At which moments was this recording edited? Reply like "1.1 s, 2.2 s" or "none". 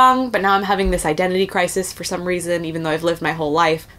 none